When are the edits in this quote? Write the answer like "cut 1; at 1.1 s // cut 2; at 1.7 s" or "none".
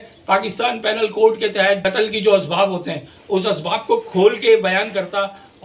cut 1; at 1.8 s